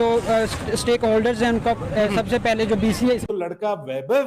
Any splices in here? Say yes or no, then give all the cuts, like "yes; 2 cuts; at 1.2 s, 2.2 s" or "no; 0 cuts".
yes; 1 cut; at 3.3 s